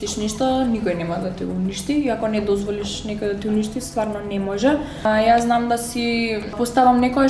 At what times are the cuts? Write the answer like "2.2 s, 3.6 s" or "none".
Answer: 5.0 s, 6.5 s